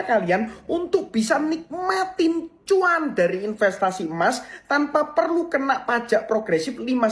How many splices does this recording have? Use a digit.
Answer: 0